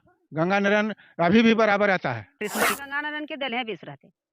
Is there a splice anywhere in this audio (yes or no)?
yes